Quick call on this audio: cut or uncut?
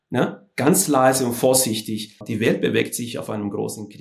cut